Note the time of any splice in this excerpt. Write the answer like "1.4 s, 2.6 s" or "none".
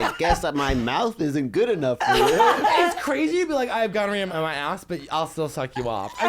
4.3 s